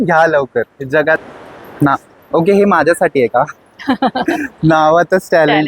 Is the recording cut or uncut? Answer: cut